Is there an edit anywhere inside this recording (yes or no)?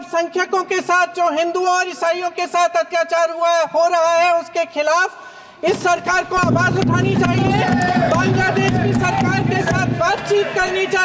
no